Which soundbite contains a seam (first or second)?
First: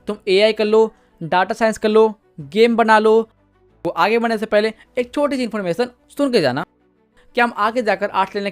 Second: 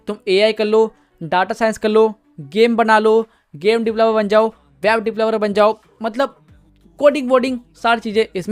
first